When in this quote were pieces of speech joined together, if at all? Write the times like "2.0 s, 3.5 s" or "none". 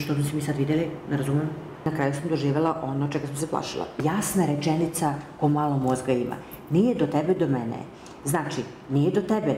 1.9 s, 4.0 s